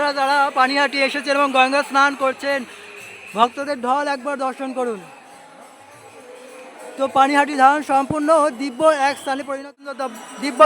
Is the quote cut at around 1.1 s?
no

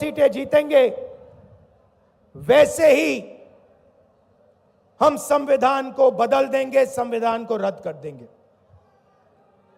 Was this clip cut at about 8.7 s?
no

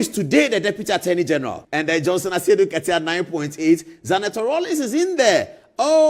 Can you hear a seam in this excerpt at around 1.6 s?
yes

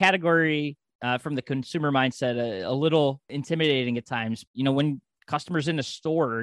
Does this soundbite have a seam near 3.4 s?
yes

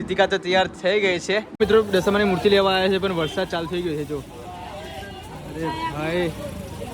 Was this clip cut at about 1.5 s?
yes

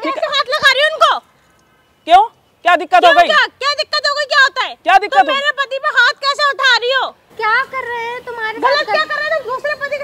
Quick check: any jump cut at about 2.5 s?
no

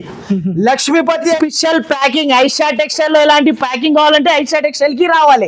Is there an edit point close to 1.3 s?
yes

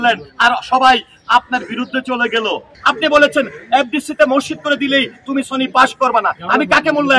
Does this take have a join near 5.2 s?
no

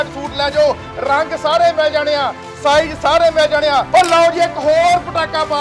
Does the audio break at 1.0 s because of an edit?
no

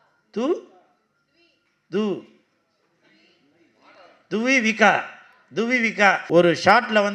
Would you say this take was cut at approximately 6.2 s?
yes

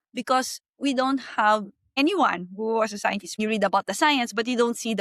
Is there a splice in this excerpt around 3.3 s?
yes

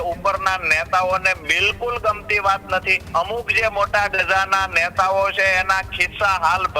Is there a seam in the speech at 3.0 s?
yes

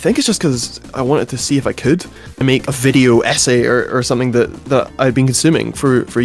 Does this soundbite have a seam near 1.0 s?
no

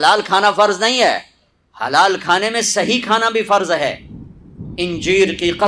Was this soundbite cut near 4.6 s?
yes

